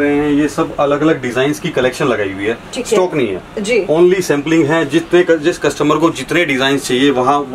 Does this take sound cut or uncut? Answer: uncut